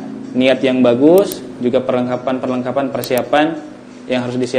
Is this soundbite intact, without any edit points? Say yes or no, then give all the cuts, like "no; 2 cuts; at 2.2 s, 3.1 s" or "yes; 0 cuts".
yes; 0 cuts